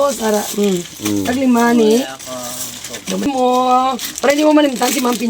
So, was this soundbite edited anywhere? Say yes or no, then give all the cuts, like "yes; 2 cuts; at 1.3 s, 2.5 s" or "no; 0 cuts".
yes; 1 cut; at 3.2 s